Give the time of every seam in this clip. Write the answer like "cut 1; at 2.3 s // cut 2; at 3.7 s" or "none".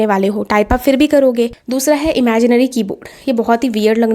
cut 1; at 1.6 s